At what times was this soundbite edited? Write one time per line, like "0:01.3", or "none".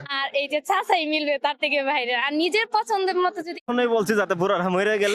0:03.7